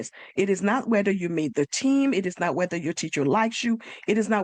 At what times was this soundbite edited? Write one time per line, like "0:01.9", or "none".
none